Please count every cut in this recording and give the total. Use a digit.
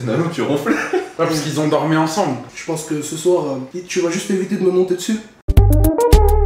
3